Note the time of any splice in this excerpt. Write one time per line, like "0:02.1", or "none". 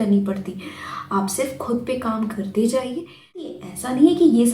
0:03.6